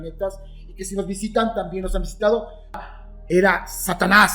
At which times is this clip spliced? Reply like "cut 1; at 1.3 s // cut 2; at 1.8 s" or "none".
cut 1; at 2.8 s